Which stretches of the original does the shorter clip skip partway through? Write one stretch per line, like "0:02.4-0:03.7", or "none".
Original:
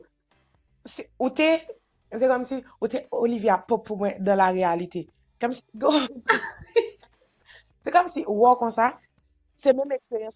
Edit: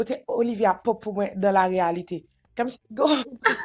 none